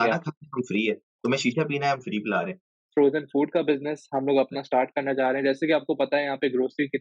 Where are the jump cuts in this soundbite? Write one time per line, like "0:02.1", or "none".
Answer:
0:02.7